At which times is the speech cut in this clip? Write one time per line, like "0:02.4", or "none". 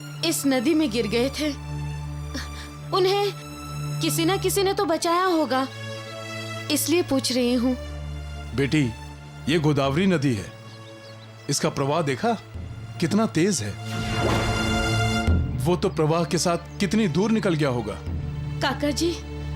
none